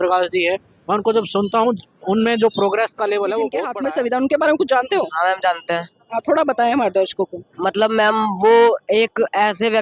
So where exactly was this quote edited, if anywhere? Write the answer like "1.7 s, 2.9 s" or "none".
3.7 s

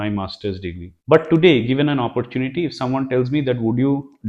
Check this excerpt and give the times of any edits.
0.9 s

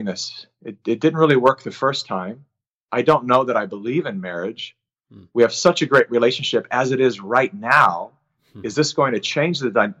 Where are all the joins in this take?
none

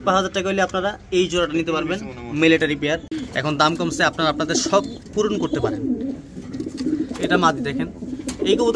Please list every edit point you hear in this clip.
3.1 s

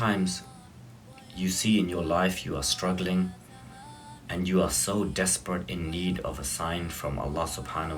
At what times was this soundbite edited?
none

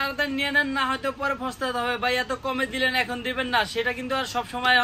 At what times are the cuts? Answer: none

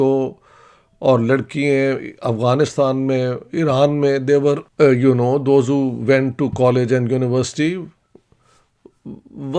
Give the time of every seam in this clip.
4.6 s

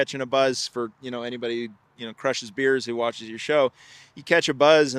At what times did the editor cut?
none

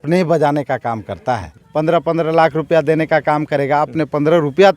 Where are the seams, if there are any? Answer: 1.6 s

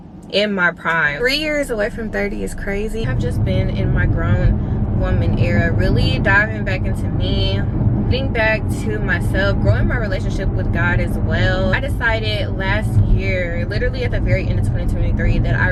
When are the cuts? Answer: none

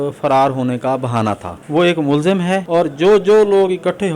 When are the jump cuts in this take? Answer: 1.5 s, 2.6 s

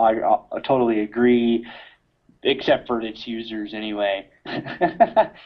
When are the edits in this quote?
none

